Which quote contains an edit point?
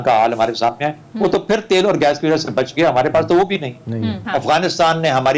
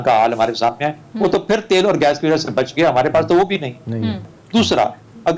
second; 1 cut; at 4.2 s

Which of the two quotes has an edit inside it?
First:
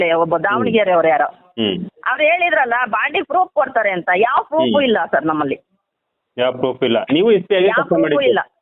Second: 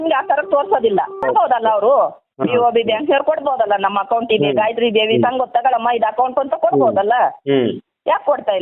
second; 1 cut; at 1.2 s

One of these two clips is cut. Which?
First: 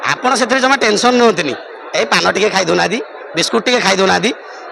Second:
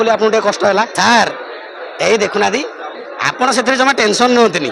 second; 1 cut; at 0.9 s

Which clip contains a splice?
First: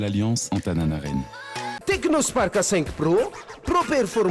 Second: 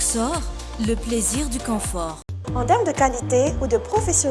first; 1 cut; at 1.7 s

